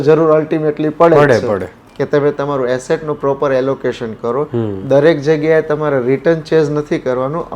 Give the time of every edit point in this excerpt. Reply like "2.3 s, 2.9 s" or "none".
1.8 s